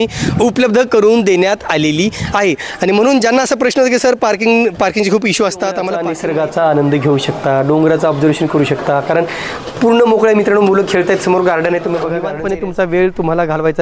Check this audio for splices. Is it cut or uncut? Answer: cut